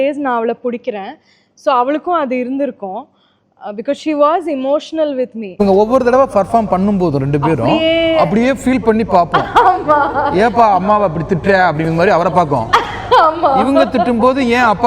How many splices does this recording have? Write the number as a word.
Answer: one